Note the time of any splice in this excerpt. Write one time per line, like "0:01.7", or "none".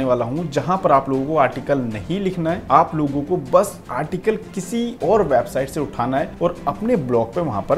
0:02.6
0:03.8
0:04.9
0:06.3